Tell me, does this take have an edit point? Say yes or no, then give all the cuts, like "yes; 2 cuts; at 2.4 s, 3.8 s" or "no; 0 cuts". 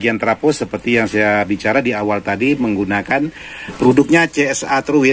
yes; 1 cut; at 3.8 s